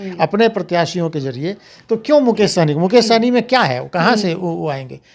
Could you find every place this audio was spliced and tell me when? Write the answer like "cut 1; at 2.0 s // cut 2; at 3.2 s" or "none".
none